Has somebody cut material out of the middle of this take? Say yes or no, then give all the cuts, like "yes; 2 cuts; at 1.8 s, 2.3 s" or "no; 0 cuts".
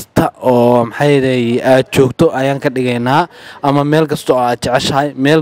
no; 0 cuts